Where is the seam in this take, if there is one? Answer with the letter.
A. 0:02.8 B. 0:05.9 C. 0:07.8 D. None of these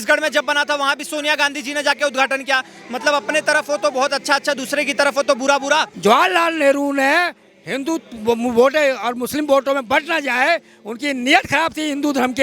B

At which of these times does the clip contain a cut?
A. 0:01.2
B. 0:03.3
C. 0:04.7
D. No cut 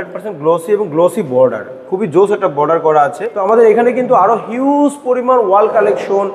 B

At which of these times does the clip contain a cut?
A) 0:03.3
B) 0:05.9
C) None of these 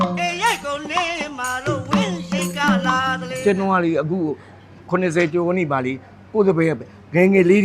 A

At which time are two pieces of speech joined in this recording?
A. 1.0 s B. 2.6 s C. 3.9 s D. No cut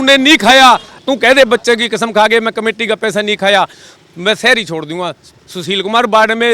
A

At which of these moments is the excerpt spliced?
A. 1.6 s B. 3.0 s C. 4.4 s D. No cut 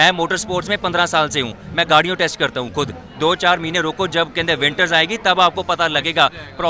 B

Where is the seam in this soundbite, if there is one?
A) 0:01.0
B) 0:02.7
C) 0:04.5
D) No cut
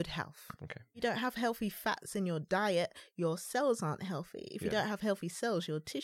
A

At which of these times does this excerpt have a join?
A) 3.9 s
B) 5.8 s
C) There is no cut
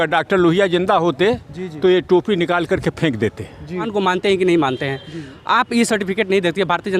A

